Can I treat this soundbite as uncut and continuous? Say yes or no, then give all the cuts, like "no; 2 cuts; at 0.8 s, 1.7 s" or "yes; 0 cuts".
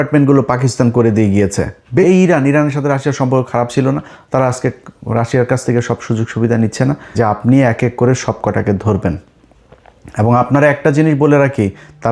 no; 2 cuts; at 2.0 s, 7.0 s